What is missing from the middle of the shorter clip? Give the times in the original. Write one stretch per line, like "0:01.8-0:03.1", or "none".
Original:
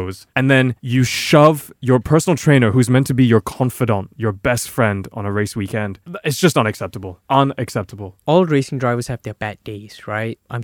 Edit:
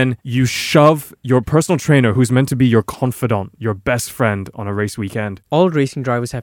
0:05.9-0:08.1